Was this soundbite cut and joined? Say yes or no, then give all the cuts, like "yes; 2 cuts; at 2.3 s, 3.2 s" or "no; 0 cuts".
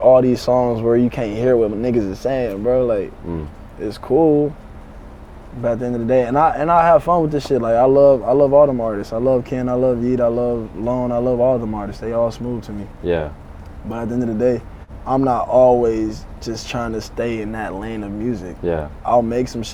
no; 0 cuts